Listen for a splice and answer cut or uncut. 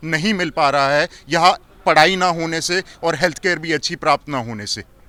uncut